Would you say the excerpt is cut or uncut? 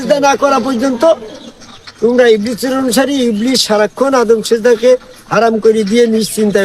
uncut